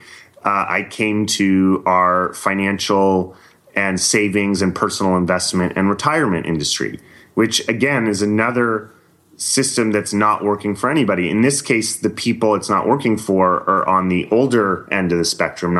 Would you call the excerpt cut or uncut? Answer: uncut